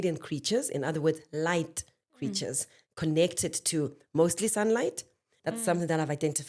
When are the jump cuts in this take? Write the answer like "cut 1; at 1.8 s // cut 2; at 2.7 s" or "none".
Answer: cut 1; at 5.3 s